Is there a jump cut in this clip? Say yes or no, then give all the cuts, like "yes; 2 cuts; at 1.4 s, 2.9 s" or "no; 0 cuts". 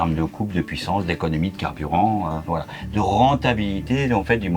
no; 0 cuts